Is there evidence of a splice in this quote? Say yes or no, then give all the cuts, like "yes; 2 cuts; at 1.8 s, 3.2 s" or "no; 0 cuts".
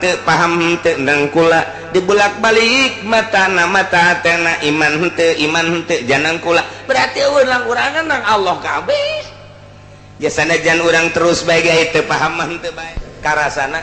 yes; 1 cut; at 12.8 s